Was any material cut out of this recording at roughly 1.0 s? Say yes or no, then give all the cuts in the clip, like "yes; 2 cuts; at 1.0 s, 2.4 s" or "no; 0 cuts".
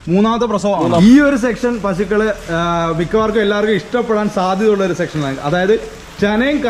yes; 1 cut; at 1.0 s